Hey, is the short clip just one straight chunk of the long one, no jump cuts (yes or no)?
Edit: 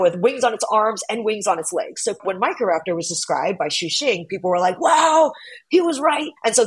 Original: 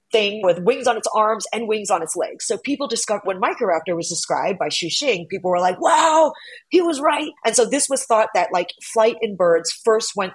no